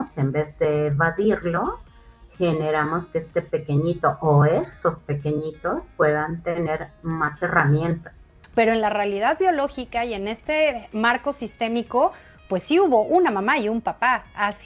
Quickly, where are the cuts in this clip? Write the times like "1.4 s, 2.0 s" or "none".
8.4 s